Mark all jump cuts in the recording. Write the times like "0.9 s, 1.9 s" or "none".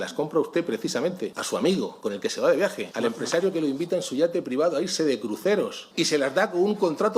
1.4 s, 1.9 s, 2.8 s, 5.8 s